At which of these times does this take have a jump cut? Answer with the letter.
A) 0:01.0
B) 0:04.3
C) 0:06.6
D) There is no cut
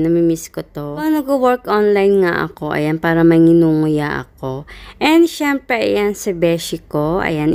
A